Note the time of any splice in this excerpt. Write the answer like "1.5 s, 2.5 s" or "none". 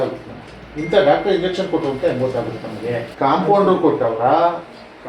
3.1 s